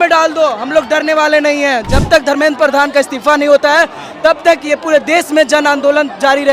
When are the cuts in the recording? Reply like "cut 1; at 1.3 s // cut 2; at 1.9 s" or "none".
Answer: cut 1; at 1.8 s